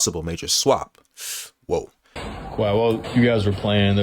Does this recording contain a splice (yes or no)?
yes